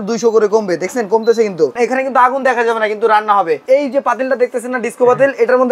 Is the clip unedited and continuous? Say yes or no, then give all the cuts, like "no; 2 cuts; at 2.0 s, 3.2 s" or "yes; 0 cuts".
no; 2 cuts; at 1.8 s, 3.6 s